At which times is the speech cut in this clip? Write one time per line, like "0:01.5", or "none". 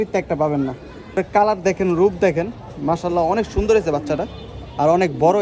0:01.2